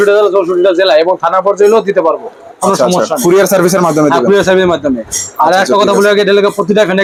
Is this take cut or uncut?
uncut